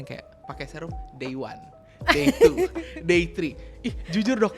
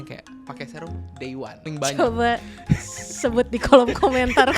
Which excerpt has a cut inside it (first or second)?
second